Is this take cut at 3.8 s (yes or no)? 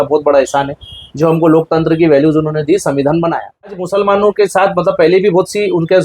yes